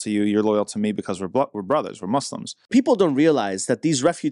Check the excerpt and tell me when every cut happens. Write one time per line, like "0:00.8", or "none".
0:02.6

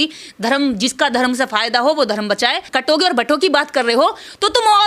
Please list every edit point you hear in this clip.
0:02.7

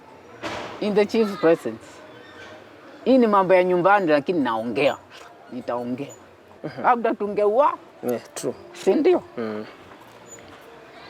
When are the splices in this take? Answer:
0:06.6

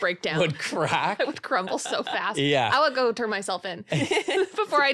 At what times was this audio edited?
none

